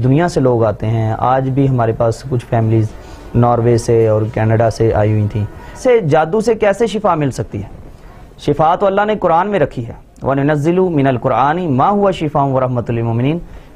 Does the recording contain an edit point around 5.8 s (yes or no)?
yes